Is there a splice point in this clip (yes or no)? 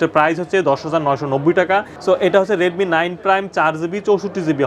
yes